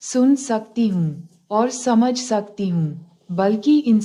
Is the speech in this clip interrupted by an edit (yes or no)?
no